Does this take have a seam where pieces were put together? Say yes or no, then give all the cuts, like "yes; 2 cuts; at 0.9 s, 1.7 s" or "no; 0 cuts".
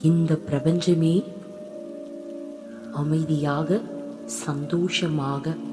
no; 0 cuts